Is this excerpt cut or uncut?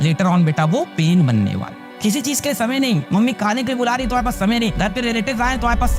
cut